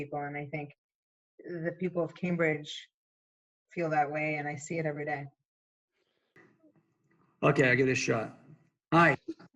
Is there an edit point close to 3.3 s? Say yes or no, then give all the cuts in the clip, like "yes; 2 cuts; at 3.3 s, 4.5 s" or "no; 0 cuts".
no; 1 cut; at 6.4 s